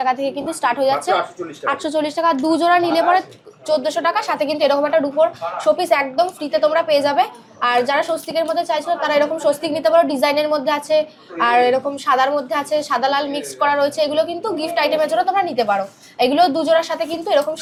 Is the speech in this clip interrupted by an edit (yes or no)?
no